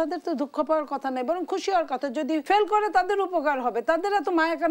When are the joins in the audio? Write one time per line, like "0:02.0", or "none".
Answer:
0:02.4